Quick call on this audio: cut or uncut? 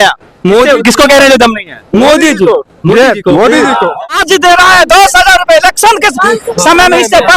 cut